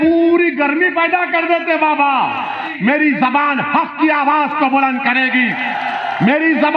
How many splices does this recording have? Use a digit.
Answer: 1